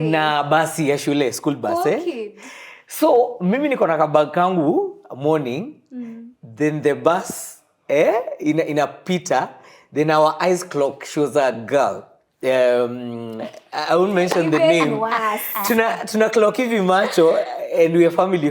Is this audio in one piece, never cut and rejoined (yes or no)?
yes